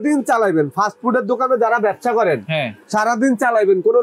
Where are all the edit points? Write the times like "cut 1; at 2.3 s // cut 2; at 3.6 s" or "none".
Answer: none